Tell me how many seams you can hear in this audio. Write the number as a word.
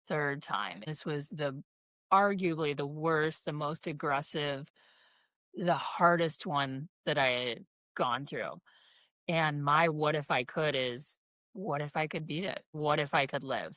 two